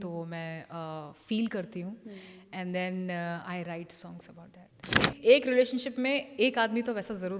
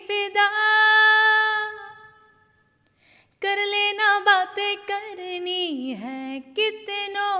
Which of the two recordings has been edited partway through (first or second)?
first